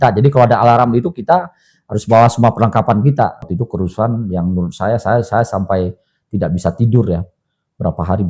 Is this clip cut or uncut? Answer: cut